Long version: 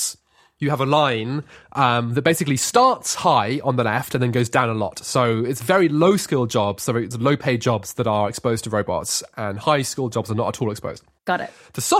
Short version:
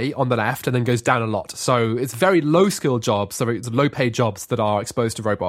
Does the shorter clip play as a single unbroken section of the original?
yes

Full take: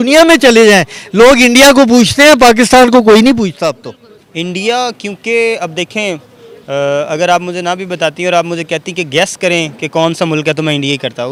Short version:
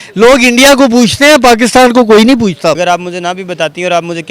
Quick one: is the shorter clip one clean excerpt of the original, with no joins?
no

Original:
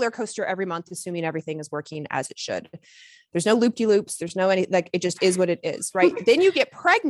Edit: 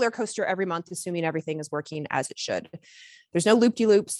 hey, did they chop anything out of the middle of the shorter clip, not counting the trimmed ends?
no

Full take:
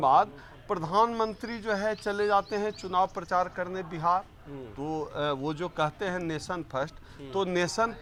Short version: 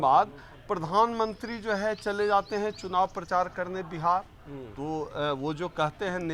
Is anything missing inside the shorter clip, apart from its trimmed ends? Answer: no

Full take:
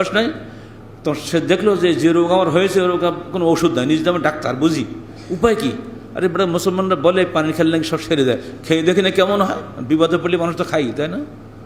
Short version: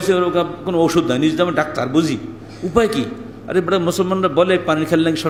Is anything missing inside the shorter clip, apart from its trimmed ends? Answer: no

